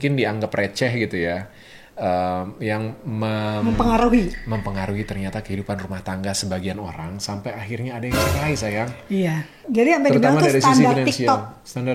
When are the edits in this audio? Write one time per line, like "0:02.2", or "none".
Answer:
0:09.6